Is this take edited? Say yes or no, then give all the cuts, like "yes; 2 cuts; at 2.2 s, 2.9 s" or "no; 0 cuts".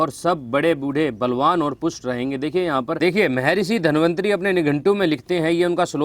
yes; 1 cut; at 3.0 s